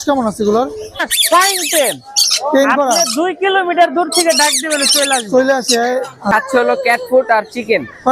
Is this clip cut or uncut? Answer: cut